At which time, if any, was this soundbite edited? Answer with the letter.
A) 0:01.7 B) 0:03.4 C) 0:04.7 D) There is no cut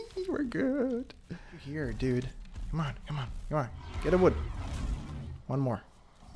A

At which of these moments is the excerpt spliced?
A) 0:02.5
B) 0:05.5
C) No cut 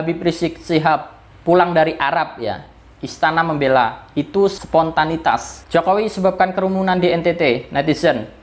B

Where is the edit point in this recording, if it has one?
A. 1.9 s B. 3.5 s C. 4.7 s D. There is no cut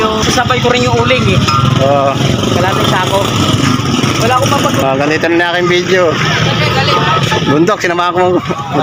D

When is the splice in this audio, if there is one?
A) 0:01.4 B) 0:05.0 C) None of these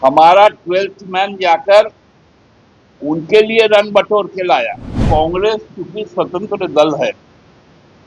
B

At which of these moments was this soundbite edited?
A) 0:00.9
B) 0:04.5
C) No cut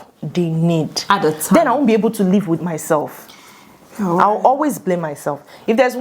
C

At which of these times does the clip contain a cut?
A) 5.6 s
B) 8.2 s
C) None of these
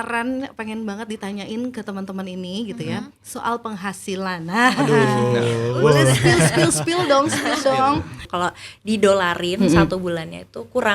B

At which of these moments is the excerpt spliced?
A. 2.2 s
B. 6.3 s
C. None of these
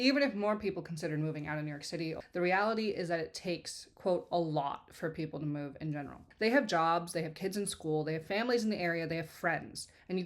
A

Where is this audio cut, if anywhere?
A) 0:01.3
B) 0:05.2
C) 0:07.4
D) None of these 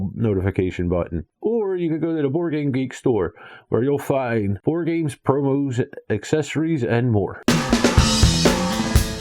C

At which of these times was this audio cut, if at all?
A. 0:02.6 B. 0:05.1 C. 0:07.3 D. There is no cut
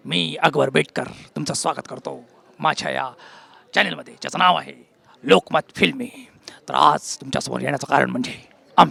D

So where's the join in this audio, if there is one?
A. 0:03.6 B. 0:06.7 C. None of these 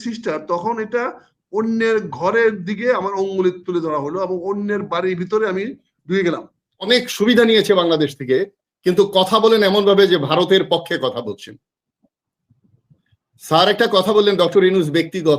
B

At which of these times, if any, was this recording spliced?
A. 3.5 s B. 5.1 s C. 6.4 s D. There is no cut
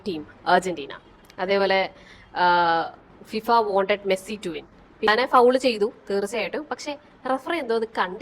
B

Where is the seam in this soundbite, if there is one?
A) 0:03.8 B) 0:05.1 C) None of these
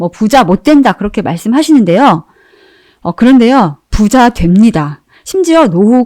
A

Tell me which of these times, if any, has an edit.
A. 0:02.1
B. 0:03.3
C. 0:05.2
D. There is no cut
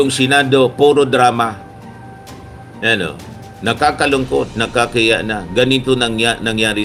D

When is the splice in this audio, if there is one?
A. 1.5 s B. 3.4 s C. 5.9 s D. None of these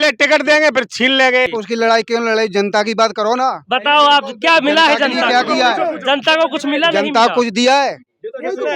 A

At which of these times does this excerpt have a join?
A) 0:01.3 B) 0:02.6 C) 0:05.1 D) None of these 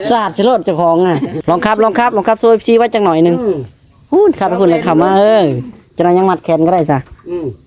A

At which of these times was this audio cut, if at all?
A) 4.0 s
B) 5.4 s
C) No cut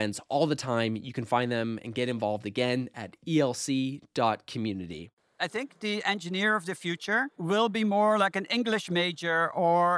B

